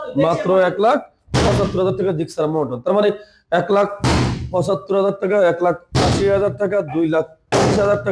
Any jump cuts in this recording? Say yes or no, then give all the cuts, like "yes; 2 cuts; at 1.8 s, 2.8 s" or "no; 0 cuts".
no; 0 cuts